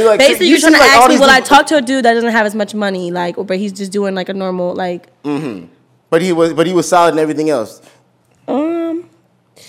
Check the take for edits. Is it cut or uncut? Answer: uncut